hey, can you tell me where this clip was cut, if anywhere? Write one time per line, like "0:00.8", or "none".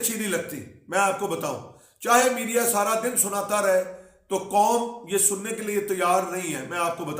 none